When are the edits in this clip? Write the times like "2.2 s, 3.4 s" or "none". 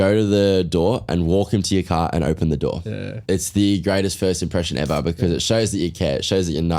3.1 s